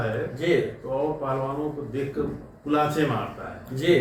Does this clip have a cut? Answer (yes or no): no